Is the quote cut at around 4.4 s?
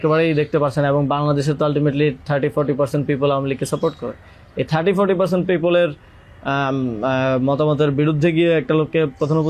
no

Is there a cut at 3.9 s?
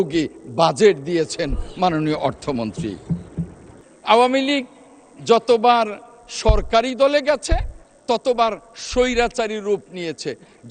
yes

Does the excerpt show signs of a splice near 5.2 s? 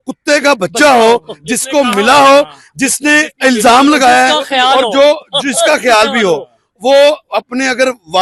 no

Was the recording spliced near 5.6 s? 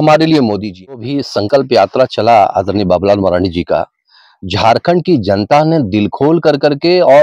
no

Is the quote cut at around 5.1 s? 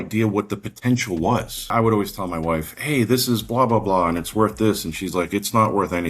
no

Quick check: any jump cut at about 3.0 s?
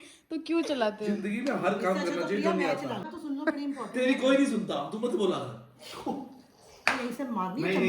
yes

